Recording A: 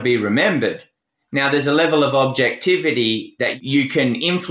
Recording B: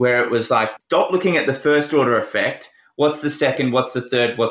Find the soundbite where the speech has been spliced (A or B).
A